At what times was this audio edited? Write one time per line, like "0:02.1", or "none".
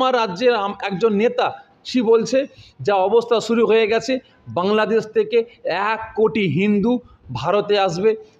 none